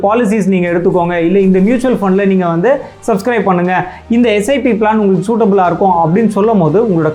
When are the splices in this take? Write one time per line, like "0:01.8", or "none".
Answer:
none